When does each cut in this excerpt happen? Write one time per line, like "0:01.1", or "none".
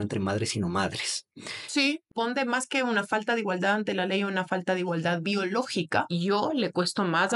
0:02.1
0:06.1